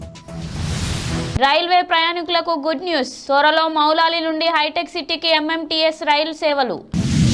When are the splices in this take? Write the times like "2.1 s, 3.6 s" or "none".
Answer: none